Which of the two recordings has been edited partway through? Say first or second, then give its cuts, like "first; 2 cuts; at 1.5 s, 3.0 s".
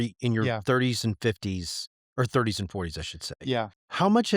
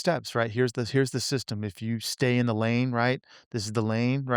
first; 1 cut; at 3.4 s